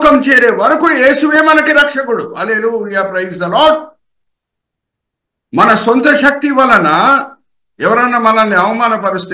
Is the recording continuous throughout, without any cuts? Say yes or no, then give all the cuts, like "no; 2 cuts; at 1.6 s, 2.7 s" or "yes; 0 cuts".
yes; 0 cuts